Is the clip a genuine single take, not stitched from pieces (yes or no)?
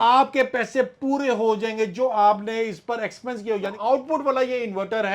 no